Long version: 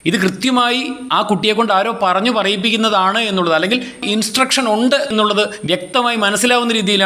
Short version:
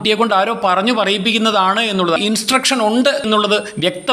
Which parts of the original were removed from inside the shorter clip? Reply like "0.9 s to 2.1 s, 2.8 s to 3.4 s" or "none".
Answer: 3.5 s to 4.0 s